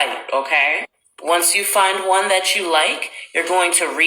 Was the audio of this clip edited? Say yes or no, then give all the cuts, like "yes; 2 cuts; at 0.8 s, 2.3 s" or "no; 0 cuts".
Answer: yes; 1 cut; at 2.3 s